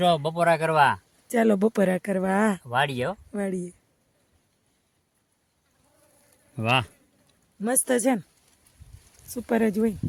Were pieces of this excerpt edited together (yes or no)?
no